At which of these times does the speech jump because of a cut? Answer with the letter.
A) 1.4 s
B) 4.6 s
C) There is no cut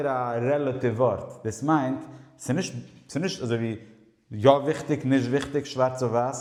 C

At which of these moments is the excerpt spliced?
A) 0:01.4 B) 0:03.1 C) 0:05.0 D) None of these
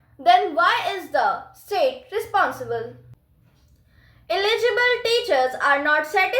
B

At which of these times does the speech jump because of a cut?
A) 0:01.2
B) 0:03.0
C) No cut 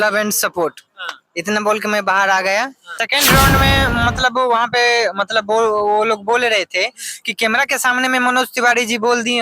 B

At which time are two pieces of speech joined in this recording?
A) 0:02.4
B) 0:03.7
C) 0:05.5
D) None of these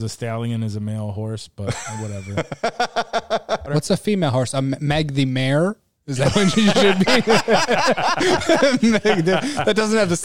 B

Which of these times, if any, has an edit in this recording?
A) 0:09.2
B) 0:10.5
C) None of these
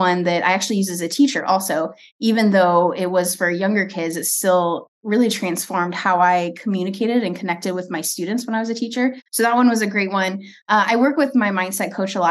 A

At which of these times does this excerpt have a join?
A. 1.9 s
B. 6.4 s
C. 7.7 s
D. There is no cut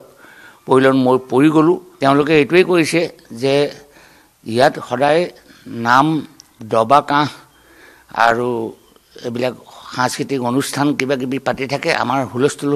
A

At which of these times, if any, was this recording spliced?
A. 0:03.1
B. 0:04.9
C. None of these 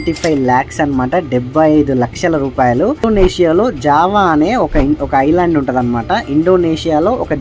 A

